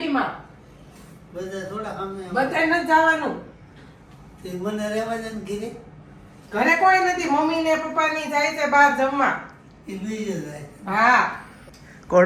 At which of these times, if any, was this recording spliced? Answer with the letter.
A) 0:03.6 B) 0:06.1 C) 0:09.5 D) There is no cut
D